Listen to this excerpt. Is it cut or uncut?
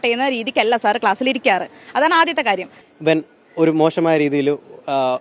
cut